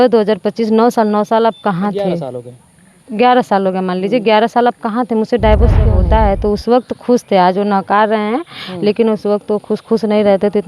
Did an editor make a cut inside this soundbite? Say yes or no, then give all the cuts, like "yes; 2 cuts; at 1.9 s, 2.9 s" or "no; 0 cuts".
yes; 1 cut; at 6.0 s